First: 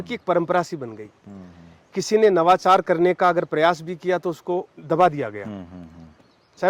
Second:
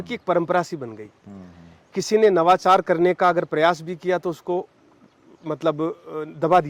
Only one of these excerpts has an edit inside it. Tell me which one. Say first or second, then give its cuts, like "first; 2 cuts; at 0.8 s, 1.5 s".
first; 1 cut; at 4.8 s